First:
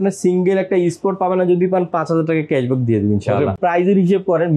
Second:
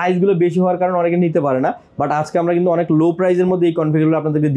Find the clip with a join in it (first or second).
first